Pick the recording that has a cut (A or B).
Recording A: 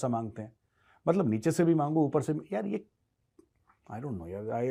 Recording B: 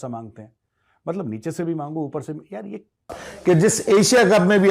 B